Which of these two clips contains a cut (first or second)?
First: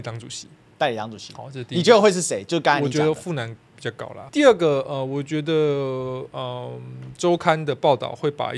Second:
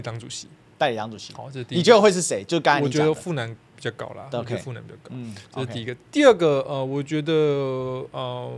first